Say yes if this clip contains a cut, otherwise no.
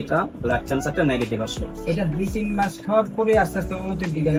no